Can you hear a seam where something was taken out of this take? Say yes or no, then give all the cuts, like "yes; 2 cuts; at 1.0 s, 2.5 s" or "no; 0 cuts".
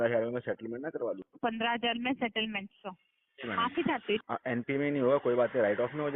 yes; 2 cuts; at 1.3 s, 4.2 s